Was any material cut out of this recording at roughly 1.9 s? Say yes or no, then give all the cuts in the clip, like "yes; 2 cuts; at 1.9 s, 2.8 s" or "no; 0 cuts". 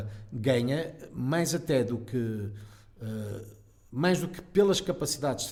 no; 0 cuts